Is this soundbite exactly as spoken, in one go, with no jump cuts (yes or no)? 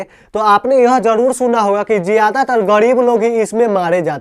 yes